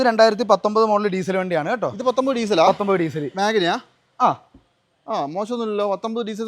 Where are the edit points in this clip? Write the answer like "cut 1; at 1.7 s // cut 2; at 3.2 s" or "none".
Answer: none